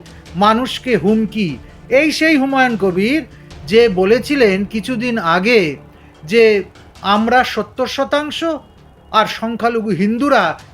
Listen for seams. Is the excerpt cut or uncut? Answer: uncut